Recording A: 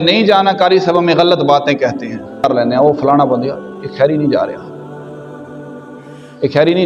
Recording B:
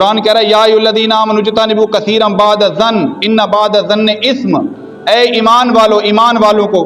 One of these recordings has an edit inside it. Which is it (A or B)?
A